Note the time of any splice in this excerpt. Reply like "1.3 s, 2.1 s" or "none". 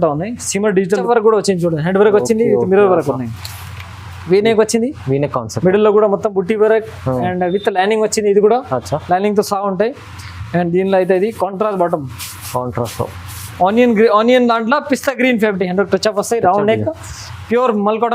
1.0 s, 15.6 s